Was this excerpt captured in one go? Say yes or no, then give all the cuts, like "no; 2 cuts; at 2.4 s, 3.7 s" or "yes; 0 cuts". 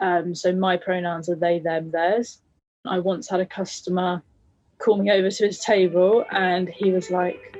no; 1 cut; at 2.9 s